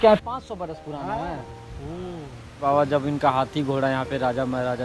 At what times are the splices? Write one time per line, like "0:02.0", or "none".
0:02.6

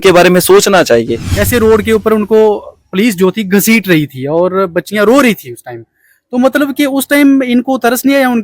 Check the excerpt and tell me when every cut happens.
0:01.4

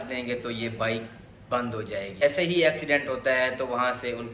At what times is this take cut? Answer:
0:02.2

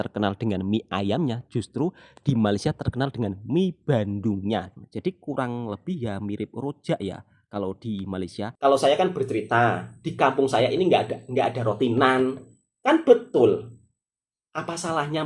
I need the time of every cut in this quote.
0:04.7
0:08.4

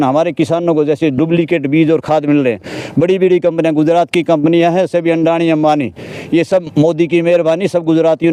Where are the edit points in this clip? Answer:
none

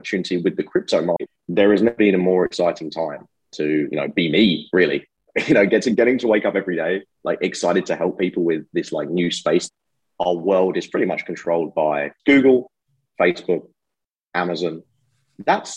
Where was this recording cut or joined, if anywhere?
0:01.3
0:09.7
0:12.1

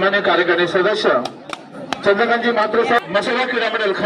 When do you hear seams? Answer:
0:03.0

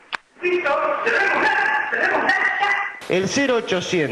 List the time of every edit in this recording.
0:02.9

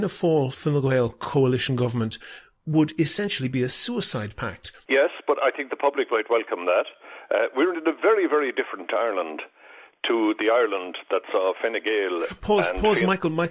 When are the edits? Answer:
0:04.7

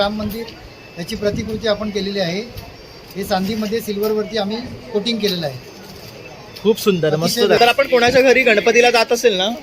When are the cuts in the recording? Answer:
0:07.6

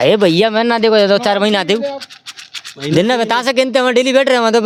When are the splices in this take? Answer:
none

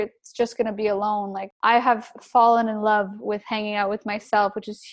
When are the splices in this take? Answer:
0:01.4

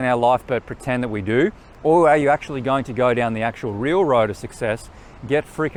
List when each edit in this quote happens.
none

